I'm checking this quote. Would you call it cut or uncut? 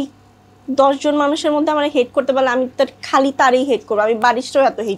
uncut